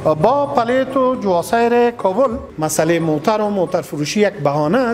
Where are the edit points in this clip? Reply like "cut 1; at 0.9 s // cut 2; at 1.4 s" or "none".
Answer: cut 1; at 2.5 s